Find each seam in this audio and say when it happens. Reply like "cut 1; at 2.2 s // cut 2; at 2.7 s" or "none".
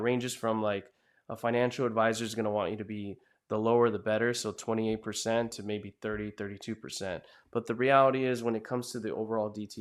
none